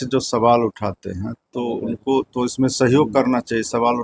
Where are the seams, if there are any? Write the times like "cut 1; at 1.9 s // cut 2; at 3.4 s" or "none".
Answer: none